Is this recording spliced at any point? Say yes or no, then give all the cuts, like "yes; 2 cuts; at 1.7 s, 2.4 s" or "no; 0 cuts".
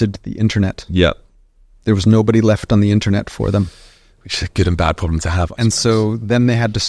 no; 0 cuts